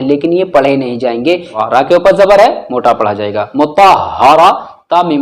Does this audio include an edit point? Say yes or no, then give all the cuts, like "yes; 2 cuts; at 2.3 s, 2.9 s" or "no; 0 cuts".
yes; 1 cut; at 1.6 s